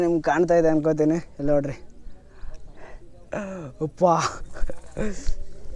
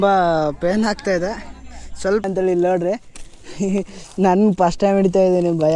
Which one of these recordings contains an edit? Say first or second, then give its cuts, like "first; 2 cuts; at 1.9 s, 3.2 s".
second; 1 cut; at 2.2 s